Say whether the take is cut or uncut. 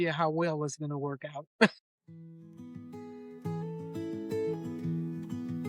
cut